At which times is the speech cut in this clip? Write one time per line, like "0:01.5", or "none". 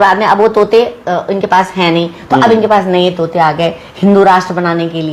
none